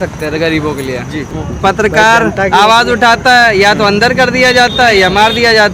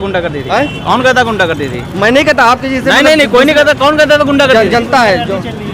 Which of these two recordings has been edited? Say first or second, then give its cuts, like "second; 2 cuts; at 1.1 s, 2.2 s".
first; 1 cut; at 1.3 s